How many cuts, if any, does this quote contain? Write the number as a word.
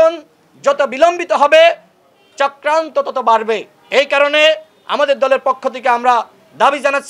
zero